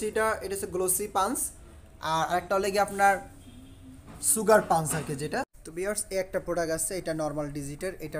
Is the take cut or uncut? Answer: cut